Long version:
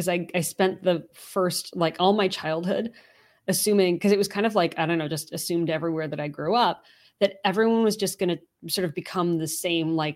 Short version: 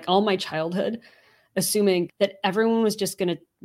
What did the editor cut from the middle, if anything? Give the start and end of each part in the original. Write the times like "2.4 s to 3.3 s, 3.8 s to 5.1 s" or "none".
4.0 s to 7.1 s